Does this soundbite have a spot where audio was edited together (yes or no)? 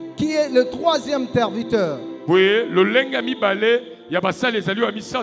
no